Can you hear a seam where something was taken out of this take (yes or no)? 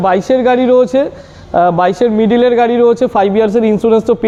no